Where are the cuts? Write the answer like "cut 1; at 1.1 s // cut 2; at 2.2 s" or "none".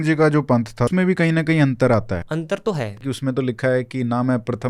cut 1; at 0.9 s // cut 2; at 2.2 s // cut 3; at 3.0 s